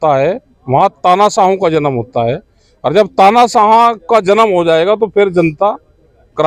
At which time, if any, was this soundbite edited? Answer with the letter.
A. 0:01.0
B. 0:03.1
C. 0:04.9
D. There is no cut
D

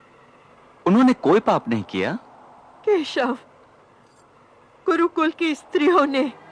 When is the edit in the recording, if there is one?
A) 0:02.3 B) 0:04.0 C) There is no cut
C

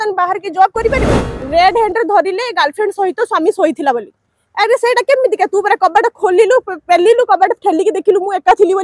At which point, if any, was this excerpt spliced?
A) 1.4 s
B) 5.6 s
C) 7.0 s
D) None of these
A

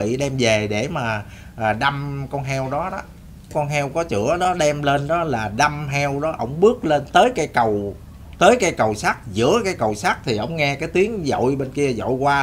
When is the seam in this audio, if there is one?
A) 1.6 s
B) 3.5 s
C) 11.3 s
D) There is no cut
B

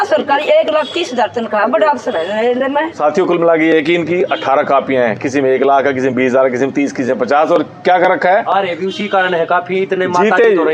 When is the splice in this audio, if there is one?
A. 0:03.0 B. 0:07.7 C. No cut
A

